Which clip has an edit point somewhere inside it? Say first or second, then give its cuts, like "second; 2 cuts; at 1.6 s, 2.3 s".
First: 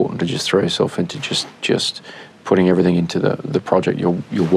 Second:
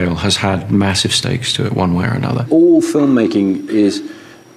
second; 1 cut; at 2.4 s